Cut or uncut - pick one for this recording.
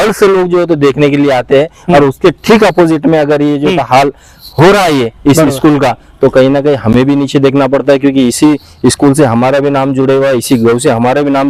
uncut